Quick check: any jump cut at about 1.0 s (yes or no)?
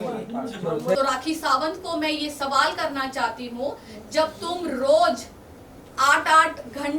yes